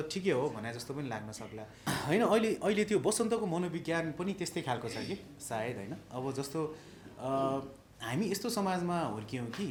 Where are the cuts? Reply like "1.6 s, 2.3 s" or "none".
none

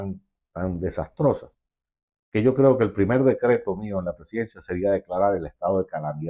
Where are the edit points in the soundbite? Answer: none

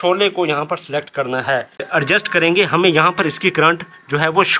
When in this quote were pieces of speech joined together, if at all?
1.9 s

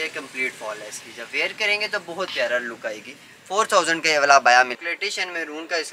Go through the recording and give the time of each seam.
4.8 s

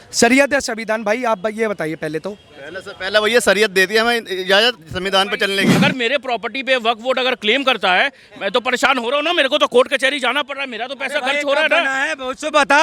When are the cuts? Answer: 5.7 s

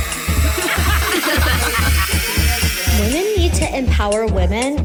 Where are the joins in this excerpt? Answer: none

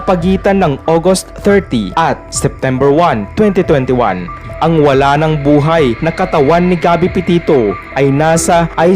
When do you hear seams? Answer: 4.4 s

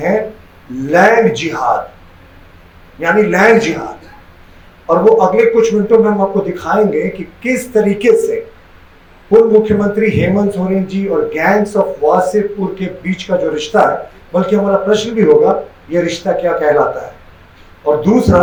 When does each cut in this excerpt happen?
none

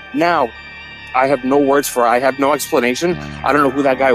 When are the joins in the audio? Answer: 1.0 s

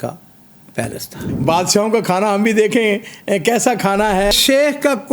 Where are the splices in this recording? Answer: 1.3 s, 4.3 s

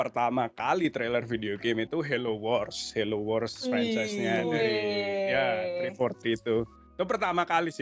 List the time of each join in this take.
none

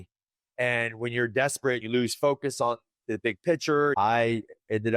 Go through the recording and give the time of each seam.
1.8 s, 3.9 s

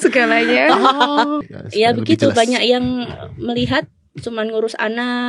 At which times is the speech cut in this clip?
1.4 s

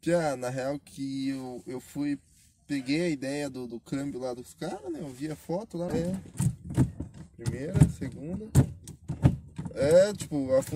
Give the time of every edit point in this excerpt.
5.9 s

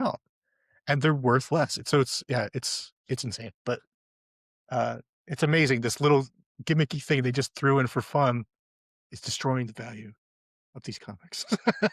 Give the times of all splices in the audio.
3.6 s

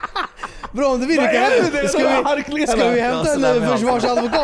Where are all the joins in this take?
none

